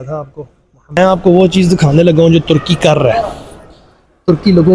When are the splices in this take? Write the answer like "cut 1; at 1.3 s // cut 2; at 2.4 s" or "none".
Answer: cut 1; at 1.0 s